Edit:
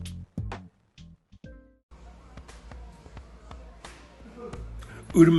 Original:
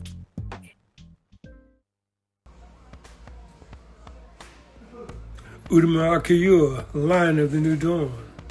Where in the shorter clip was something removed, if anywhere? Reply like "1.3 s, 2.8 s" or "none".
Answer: 1.8 s

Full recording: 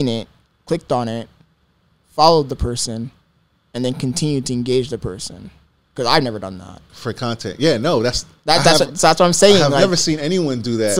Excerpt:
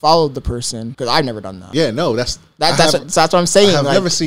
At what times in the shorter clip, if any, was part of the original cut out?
0.9 s, 1.6 s

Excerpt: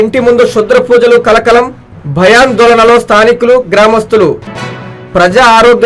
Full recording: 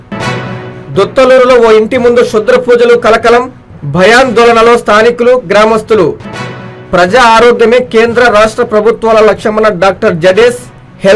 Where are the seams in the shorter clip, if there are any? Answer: none

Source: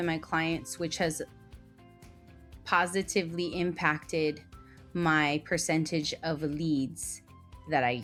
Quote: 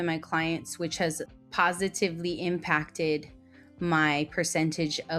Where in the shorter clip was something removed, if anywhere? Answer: 1.3 s

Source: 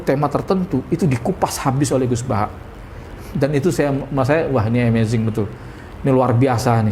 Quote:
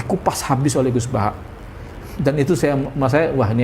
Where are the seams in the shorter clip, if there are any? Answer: none

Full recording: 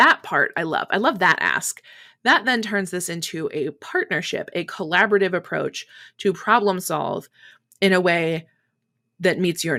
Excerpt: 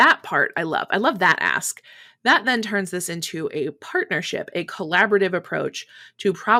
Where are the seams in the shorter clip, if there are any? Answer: none

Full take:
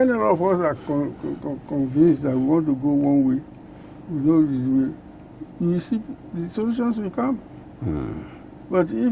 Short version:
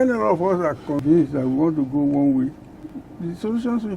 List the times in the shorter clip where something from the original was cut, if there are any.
1.0 s, 3.0 s

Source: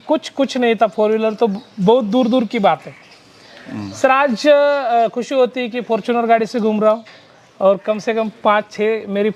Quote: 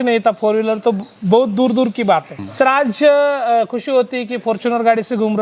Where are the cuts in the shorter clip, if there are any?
2.4 s

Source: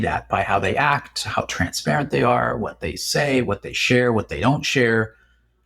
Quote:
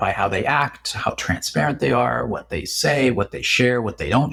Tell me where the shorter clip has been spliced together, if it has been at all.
none

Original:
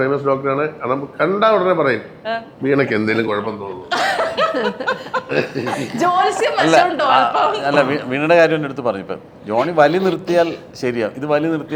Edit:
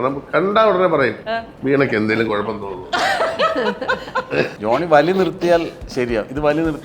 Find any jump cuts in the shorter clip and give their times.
1.2 s, 4.5 s

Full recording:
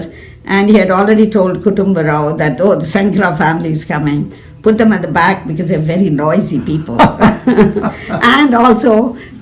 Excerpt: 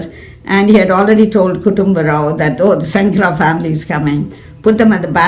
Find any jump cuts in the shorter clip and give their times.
none

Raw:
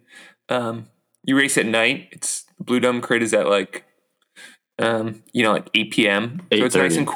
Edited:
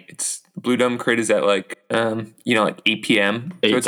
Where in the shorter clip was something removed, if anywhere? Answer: 1.7 s

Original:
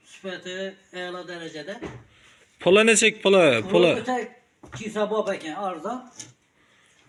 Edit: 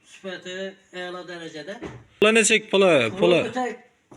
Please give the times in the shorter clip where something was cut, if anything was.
2.2 s

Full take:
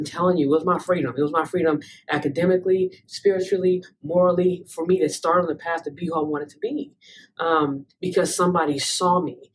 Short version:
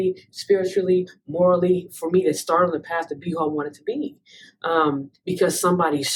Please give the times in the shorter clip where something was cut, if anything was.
none

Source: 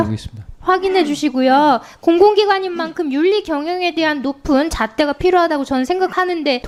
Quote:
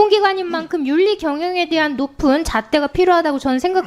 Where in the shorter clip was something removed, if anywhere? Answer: none

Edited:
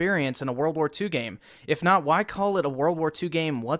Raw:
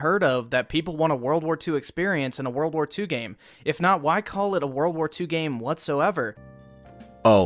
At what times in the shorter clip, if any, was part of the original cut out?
none

